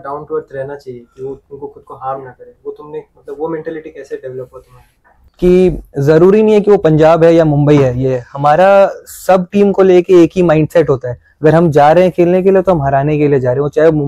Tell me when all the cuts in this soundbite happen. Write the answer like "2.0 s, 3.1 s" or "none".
5.2 s

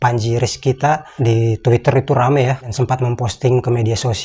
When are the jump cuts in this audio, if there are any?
2.7 s

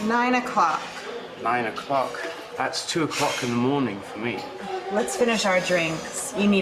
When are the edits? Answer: 2.8 s, 4.6 s

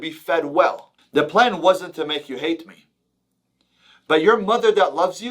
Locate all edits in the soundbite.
0.9 s

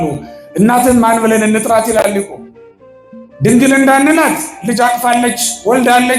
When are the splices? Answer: none

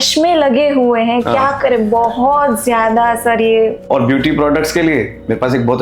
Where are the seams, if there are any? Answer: 3.8 s

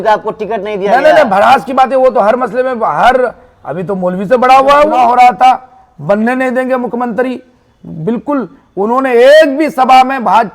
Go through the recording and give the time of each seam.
4.9 s

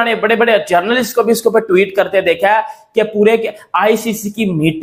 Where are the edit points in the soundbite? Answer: none

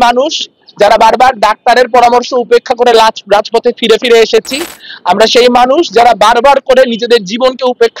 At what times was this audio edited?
none

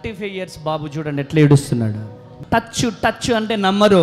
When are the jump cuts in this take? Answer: 2.3 s

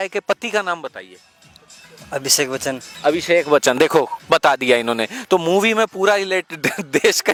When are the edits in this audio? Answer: none

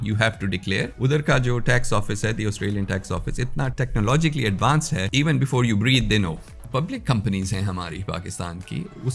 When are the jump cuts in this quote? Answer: 0.9 s, 3.7 s, 5.1 s, 6.6 s

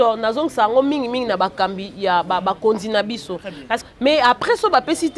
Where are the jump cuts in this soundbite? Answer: 3.8 s

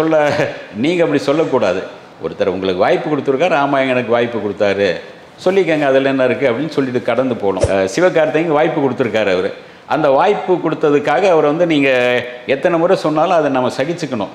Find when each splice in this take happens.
7.6 s

